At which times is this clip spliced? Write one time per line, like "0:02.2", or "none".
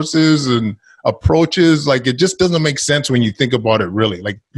none

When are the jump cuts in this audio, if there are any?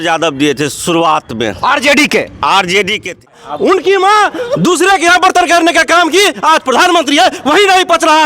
0:03.3

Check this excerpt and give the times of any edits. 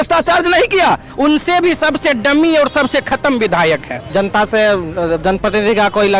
0:01.1
0:04.0

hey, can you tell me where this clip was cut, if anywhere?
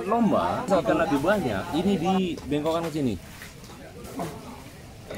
0:01.7

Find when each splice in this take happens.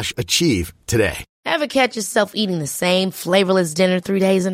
0:01.3

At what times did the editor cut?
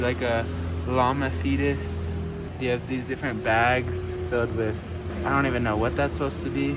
none

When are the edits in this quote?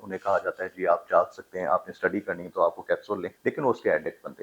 0:03.3

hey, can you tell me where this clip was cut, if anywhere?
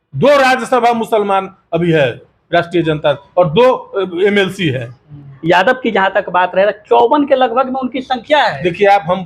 0:05.3

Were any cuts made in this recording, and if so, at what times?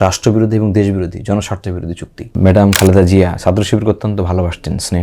0:02.3

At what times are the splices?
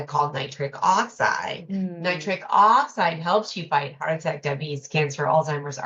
none

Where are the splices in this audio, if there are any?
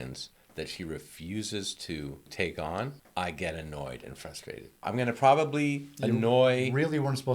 0:02.3
0:03.0
0:04.8

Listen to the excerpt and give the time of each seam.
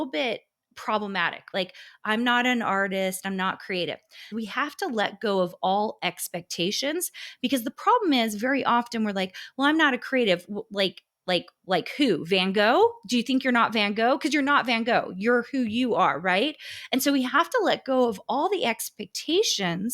0:01.5
0:04.3

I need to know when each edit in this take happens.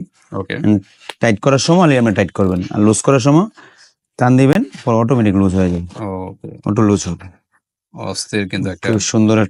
none

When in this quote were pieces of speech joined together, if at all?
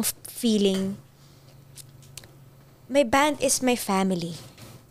none

